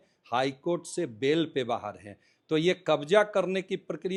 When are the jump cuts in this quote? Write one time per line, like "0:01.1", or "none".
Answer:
none